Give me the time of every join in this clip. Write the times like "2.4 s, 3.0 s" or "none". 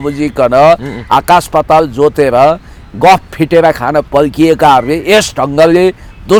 none